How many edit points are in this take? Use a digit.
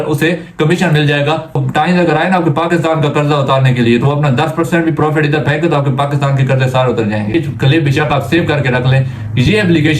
2